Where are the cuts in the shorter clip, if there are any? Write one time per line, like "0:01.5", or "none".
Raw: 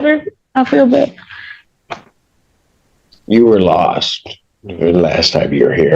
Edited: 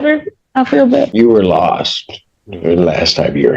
0:01.1